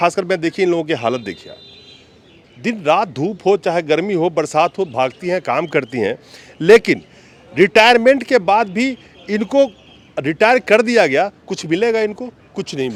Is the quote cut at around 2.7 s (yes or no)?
no